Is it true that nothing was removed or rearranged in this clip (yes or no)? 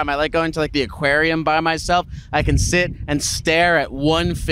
yes